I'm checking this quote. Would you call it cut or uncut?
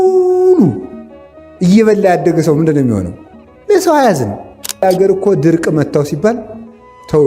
cut